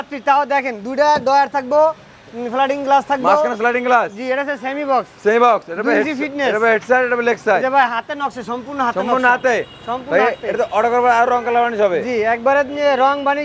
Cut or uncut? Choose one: uncut